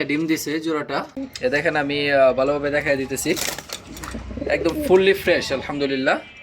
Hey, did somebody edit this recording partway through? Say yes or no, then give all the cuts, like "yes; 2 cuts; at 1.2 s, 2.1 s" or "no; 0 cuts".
yes; 1 cut; at 1.2 s